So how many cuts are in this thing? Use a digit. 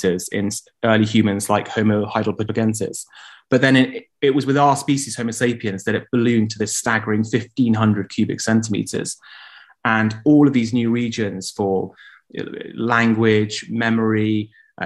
1